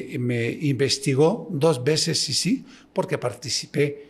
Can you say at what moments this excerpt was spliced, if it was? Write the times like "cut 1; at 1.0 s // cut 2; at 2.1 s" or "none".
none